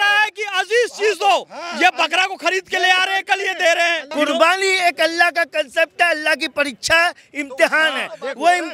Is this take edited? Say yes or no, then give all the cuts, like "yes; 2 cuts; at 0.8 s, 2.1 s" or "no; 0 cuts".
yes; 1 cut; at 4.1 s